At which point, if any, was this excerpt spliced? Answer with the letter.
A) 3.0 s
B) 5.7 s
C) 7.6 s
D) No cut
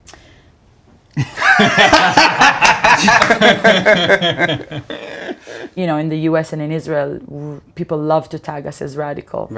B